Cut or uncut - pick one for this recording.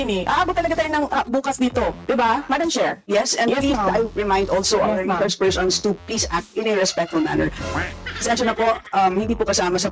cut